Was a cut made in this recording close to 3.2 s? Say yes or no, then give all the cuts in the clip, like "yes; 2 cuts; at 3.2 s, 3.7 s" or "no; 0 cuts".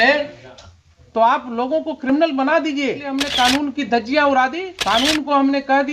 yes; 2 cuts; at 3.2 s, 4.7 s